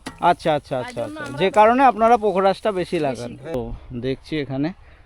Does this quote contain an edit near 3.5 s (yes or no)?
yes